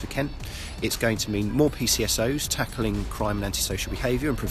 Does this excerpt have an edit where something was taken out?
no; 0 cuts

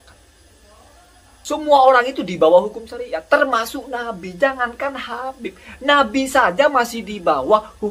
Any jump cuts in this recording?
yes; 1 cut; at 1.4 s

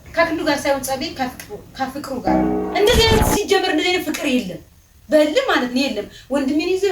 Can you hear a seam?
yes; 1 cut; at 2.6 s

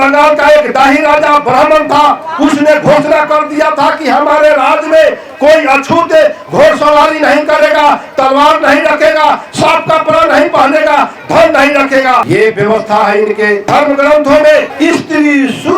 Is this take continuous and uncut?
no; 3 cuts; at 12.2 s, 13.6 s, 14.7 s

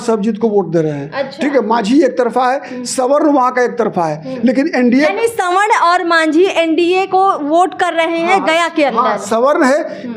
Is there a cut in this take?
no; 0 cuts

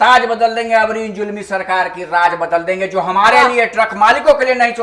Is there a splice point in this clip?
no; 0 cuts

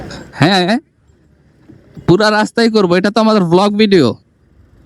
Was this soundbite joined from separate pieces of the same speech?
no; 0 cuts

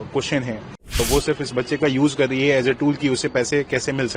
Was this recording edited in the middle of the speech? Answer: yes; 1 cut; at 1.0 s

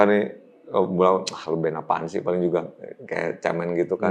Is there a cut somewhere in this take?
no; 0 cuts

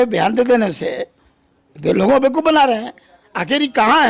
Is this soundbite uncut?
yes; 0 cuts

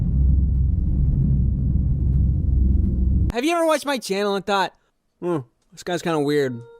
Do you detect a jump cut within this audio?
yes; 1 cut; at 3.3 s

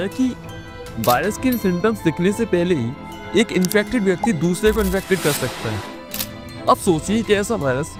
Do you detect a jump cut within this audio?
no; 0 cuts

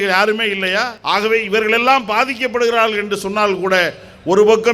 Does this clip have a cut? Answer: yes; 1 cut; at 1.0 s

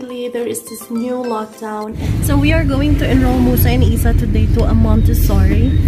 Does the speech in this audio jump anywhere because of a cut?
yes; 1 cut; at 1.7 s

